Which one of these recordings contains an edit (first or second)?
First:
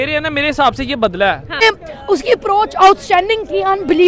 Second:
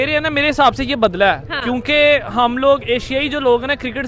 first